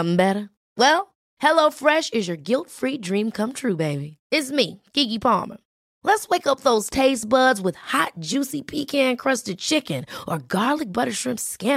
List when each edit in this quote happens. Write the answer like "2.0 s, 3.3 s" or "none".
none